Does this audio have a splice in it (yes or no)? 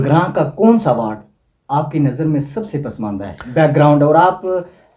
no